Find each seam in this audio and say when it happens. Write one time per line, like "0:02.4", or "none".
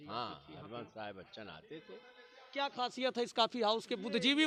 none

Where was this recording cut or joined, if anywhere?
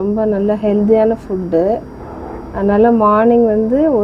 none

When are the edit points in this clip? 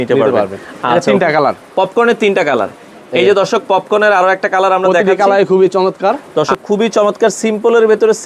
0:06.2

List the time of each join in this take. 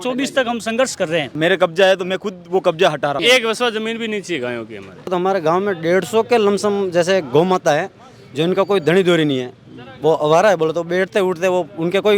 0:01.3
0:03.2
0:05.1

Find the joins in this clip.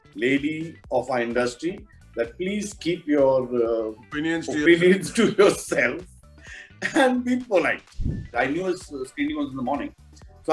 0:08.3

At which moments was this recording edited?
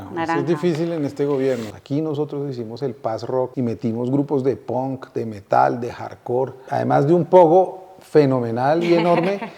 0:01.7
0:03.5
0:06.6

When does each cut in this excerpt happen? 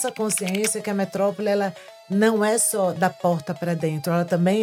none

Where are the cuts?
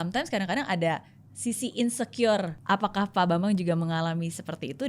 0:02.5

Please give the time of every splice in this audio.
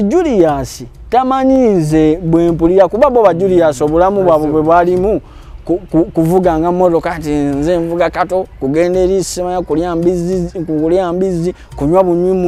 none

